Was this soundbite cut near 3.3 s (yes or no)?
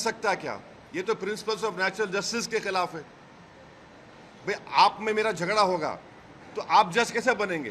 no